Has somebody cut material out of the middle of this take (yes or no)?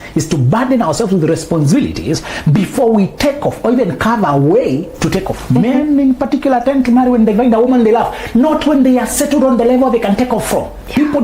yes